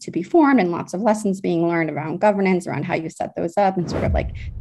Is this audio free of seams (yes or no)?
yes